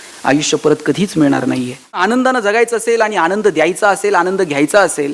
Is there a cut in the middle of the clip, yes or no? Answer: yes